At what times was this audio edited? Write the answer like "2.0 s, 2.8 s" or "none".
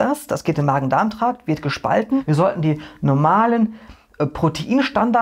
2.2 s